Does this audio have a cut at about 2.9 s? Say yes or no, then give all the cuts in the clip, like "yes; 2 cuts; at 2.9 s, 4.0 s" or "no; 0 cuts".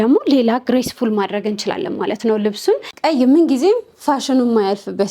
yes; 1 cut; at 2.9 s